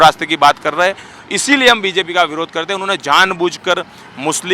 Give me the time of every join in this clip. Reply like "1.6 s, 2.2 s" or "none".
none